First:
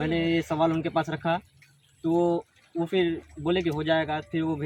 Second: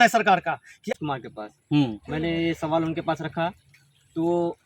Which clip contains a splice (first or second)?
second